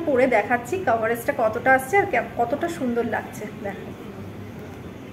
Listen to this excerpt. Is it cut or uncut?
uncut